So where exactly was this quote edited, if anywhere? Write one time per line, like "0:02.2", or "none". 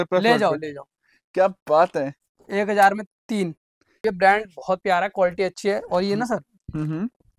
0:04.0